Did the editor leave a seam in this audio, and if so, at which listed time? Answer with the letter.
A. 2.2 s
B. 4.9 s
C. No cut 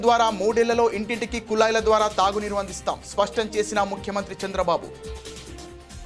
B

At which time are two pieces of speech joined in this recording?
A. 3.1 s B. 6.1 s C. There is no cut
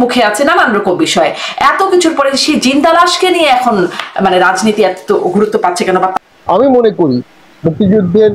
B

